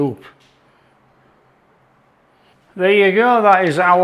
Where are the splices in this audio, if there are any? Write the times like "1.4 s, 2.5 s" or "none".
2.5 s